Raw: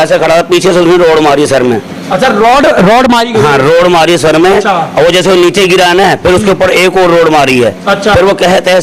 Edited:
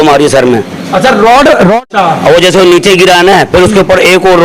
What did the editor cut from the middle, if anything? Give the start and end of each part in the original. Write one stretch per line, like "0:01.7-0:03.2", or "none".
0:03.1-0:04.6